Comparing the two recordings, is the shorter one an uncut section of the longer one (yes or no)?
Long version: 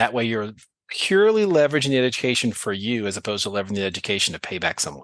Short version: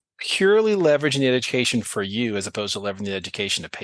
yes